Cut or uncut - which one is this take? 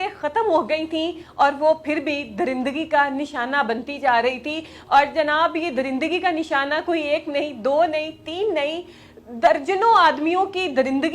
uncut